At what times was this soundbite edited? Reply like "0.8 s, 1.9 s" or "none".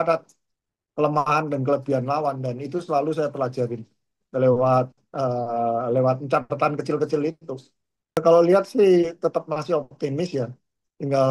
8.2 s